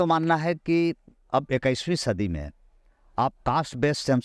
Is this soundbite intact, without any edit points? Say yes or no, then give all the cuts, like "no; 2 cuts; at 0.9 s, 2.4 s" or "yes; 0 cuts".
yes; 0 cuts